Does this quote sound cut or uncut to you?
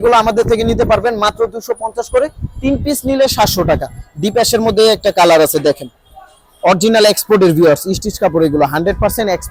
uncut